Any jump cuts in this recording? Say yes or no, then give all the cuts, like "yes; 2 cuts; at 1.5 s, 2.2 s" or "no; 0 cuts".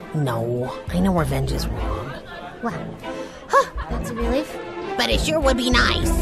no; 0 cuts